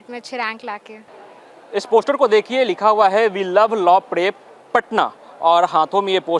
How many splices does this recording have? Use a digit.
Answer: 0